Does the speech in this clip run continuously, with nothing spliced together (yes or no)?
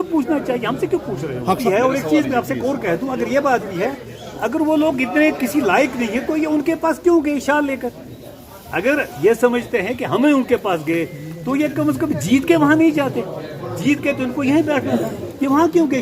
no